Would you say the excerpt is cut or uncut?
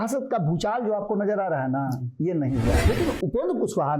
cut